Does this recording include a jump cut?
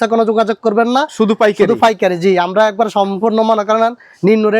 no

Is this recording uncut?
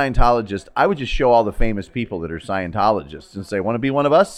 yes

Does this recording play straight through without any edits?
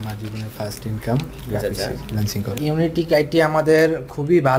no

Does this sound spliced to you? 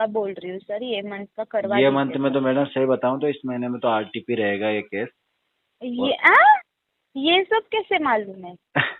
no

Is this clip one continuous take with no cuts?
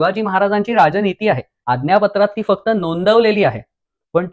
no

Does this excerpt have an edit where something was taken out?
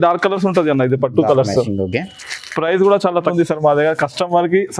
yes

